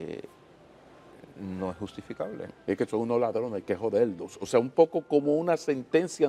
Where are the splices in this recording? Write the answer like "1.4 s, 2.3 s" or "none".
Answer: 2.5 s